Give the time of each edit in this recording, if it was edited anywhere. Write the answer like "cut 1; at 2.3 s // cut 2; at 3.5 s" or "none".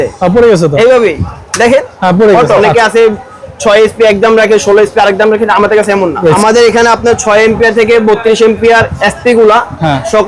cut 1; at 2.6 s // cut 2; at 6.4 s

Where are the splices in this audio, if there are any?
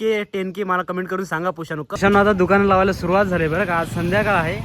cut 1; at 2.0 s

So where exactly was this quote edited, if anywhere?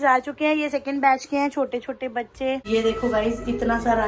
cut 1; at 2.6 s

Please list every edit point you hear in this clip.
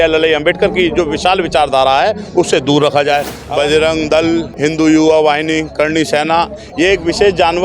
cut 1; at 3.4 s // cut 2; at 4.5 s

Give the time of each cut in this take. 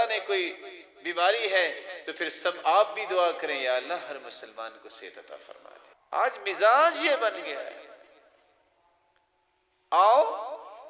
cut 1; at 5.9 s

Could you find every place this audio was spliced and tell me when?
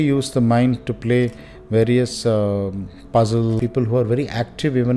cut 1; at 3.6 s

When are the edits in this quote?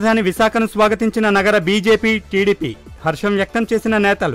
none

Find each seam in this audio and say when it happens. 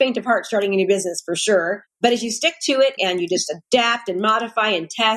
cut 1; at 3.0 s

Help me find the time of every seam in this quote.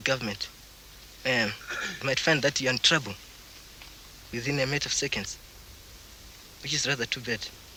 none

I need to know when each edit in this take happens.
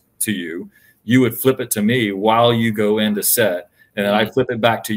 none

